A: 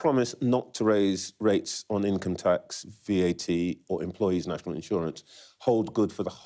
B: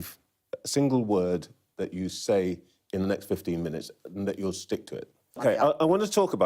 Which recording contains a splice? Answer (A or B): B